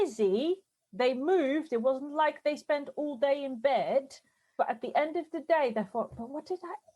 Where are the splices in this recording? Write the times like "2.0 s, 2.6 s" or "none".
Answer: 4.5 s

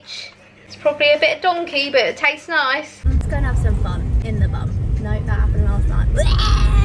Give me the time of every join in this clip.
3.1 s

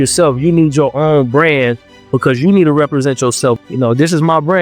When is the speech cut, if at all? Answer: 3.6 s

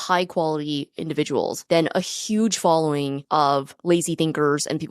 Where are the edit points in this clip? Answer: 1.6 s, 3.4 s

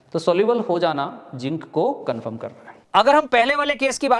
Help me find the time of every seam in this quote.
2.8 s

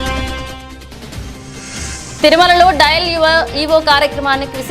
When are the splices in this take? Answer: none

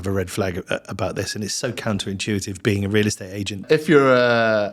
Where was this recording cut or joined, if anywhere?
3.6 s

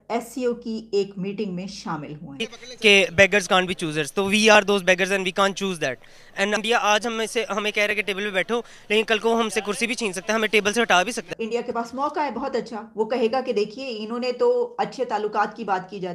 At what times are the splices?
2.5 s, 6.6 s, 11.2 s

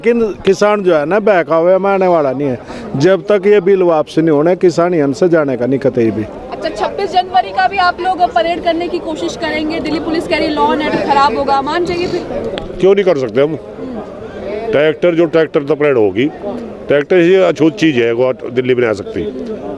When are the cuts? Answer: none

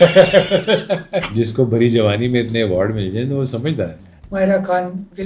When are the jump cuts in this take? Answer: 1.2 s, 4.1 s

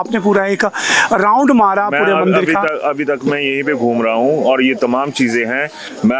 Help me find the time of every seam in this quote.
none

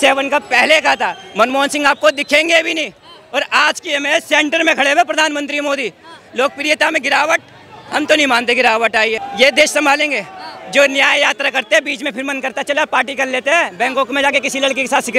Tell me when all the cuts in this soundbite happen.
9.2 s

